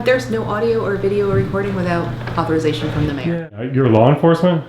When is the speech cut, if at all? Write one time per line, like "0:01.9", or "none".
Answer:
0:03.2